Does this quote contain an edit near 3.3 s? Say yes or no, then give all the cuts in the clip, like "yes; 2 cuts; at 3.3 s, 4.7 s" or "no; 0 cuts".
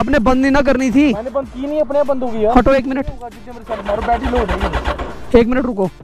no; 0 cuts